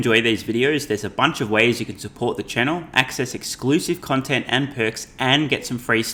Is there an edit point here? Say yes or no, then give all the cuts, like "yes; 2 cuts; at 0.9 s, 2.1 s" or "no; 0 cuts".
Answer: no; 0 cuts